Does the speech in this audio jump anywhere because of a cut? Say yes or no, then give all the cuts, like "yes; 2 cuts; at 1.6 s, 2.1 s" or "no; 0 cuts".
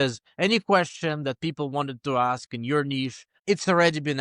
yes; 1 cut; at 3.3 s